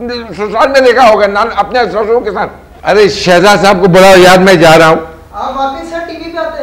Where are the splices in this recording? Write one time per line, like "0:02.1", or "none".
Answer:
0:02.6